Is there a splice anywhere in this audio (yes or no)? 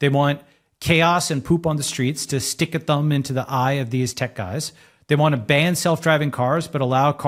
no